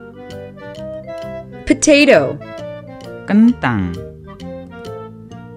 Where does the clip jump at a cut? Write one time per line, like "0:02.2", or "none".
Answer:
0:01.6
0:03.0
0:04.1